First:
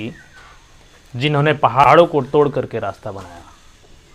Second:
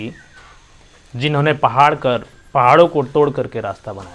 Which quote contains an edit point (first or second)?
first